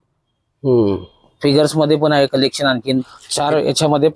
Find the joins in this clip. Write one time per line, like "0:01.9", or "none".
0:03.2